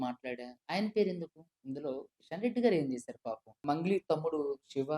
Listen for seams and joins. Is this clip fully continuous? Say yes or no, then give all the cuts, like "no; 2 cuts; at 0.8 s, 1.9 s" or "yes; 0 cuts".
no; 1 cut; at 3.6 s